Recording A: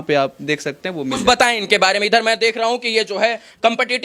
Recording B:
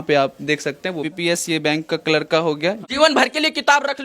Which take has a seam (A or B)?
B